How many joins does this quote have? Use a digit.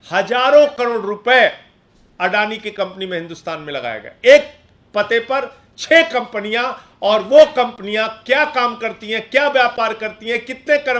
0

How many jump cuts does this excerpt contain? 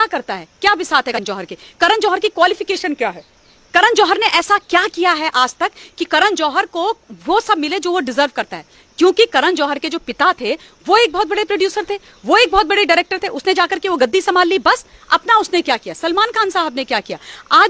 1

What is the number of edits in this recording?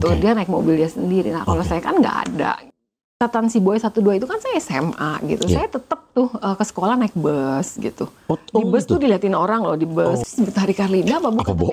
2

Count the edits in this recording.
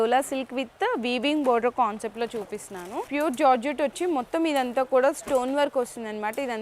1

